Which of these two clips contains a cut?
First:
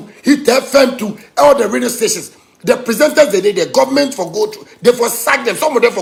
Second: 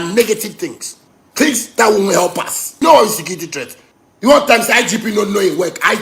second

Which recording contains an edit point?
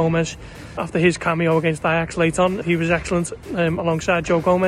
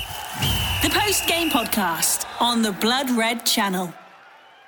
first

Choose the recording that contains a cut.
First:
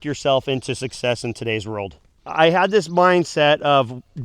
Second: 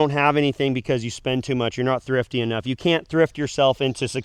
first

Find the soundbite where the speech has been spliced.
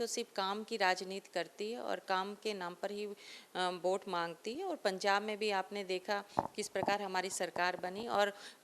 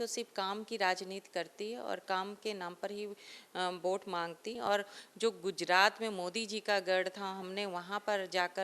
second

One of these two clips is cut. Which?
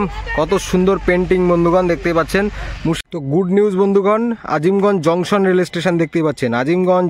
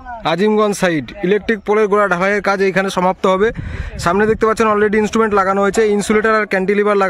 first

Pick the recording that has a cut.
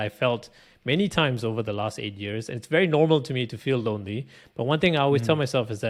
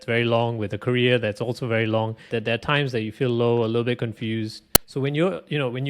second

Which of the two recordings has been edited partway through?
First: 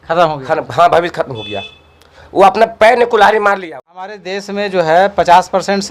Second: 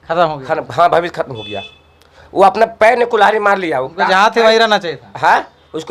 first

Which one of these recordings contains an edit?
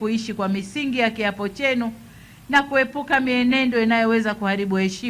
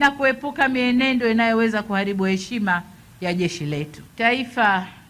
second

